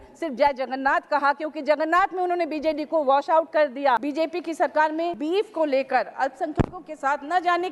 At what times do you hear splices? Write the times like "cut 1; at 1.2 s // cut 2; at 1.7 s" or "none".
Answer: cut 1; at 4.1 s // cut 2; at 5.2 s